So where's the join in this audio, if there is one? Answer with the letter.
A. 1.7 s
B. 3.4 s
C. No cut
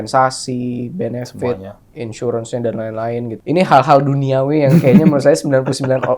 B